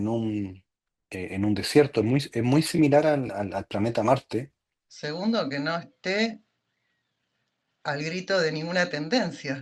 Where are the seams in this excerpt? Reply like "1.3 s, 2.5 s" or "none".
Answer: 4.9 s